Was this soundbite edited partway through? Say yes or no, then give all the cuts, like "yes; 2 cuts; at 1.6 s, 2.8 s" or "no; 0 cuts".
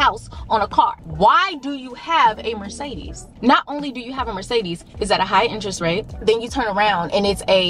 no; 0 cuts